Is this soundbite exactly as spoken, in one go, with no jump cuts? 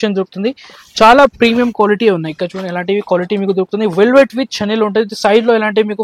yes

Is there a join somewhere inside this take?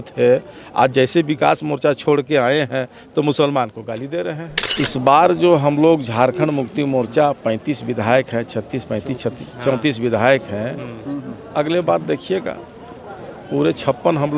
yes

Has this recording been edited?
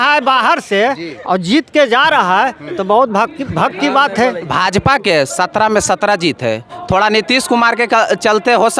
yes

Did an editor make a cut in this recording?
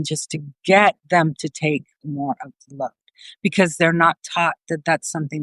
yes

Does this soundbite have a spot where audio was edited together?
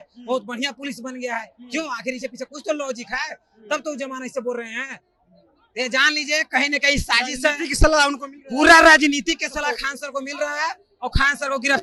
no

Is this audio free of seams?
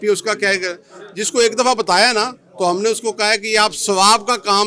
yes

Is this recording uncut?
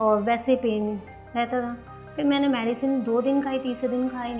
yes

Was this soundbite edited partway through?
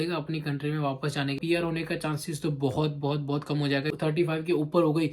yes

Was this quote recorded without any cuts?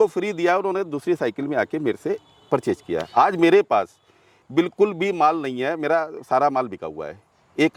yes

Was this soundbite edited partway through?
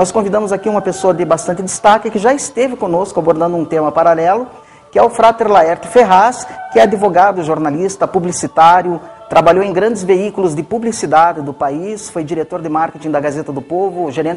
yes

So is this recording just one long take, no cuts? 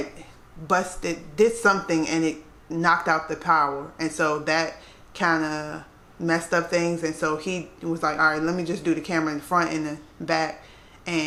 yes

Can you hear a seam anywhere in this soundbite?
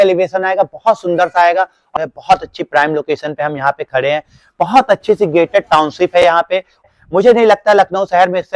yes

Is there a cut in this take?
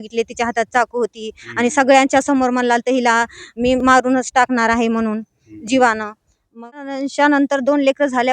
yes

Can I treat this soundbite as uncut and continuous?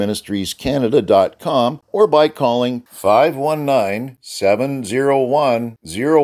no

